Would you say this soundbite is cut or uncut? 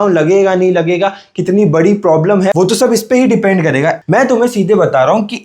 cut